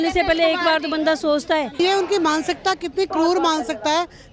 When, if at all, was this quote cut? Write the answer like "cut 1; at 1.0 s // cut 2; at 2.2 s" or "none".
cut 1; at 1.8 s